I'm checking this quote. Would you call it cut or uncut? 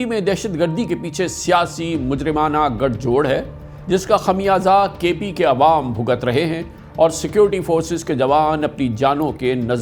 uncut